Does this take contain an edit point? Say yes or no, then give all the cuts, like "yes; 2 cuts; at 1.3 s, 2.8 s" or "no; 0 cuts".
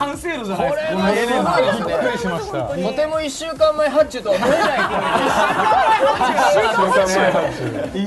yes; 1 cut; at 3.0 s